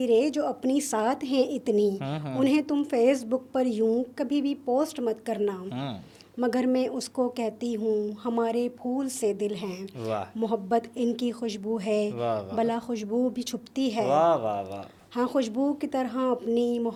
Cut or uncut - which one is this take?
uncut